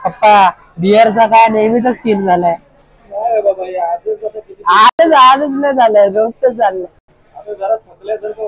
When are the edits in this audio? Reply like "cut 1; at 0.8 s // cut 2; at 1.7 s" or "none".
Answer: none